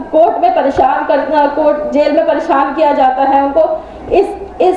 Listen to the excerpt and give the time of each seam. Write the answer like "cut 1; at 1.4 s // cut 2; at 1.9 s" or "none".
none